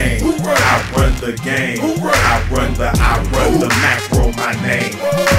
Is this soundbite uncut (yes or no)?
yes